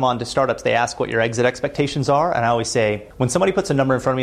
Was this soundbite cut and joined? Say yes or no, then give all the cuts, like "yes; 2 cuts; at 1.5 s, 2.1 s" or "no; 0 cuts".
yes; 1 cut; at 3.1 s